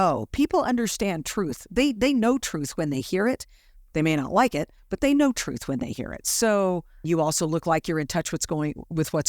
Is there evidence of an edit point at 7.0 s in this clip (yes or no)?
yes